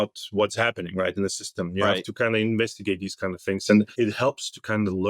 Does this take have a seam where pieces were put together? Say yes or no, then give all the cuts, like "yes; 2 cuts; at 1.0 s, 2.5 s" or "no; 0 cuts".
yes; 1 cut; at 3.9 s